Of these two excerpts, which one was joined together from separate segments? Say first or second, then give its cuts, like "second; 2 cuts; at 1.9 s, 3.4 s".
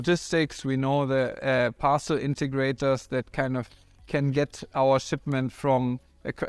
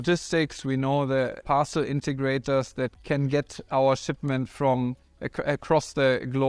second; 2 cuts; at 1.4 s, 3.0 s